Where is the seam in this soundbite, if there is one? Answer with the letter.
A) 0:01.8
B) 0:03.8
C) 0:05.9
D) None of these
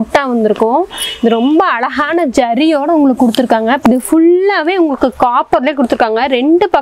B